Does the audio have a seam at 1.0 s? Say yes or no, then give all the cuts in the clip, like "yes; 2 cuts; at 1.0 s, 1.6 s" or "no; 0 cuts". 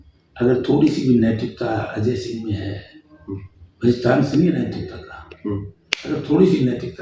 no; 0 cuts